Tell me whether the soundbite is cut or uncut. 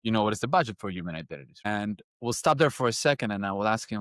cut